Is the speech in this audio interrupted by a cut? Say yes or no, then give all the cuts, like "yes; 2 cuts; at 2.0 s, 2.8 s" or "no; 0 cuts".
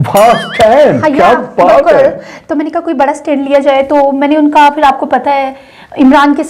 no; 0 cuts